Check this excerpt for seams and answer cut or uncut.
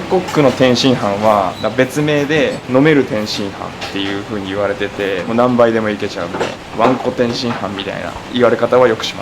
cut